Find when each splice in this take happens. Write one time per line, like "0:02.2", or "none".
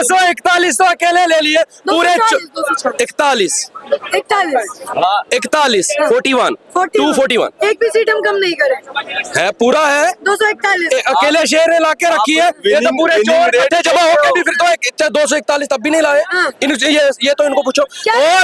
none